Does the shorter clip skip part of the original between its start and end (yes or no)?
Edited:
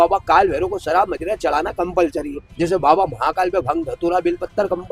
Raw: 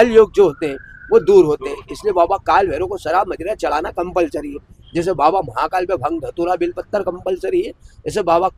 yes